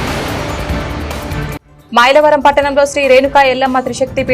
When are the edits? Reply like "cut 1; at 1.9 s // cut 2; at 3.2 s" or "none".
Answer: cut 1; at 1.7 s